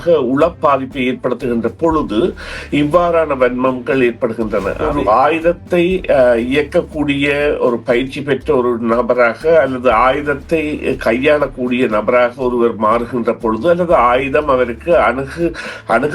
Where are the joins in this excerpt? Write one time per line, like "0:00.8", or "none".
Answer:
0:04.8